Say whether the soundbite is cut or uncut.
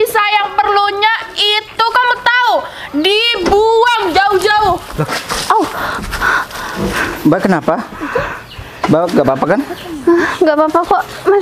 uncut